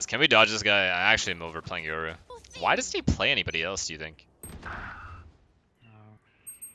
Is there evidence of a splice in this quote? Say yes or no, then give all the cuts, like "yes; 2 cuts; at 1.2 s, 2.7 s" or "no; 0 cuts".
no; 0 cuts